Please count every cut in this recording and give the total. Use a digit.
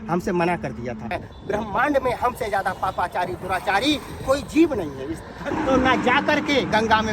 2